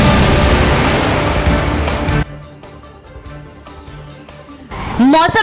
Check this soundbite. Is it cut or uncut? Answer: uncut